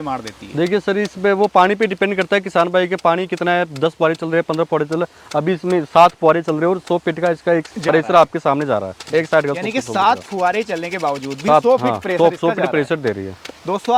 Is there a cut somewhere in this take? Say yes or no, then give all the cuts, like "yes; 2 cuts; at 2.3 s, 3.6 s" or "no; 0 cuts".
no; 0 cuts